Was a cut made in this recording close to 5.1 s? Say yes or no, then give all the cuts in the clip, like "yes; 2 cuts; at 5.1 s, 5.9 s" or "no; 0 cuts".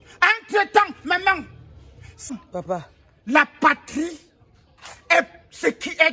no; 1 cut; at 2.3 s